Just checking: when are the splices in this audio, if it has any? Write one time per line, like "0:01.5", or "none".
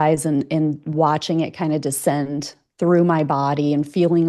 none

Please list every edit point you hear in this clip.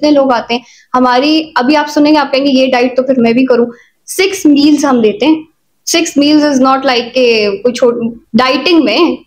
none

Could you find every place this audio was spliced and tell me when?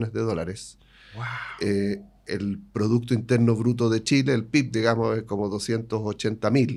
none

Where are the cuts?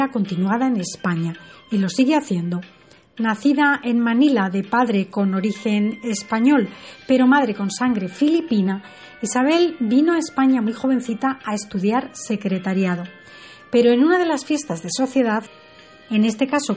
0:01.9

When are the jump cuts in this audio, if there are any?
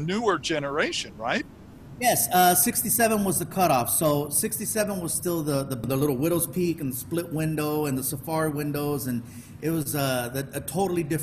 0:05.8

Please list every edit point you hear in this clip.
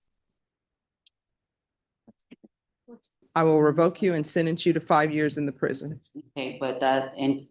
0:03.2

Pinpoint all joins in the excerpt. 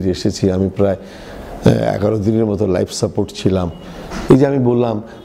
0:04.1

